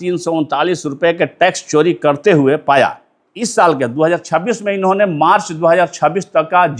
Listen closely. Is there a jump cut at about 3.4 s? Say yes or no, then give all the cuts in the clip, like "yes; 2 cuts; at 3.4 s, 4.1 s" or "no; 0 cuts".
yes; 1 cut; at 3.4 s